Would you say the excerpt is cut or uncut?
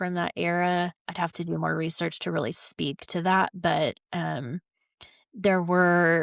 cut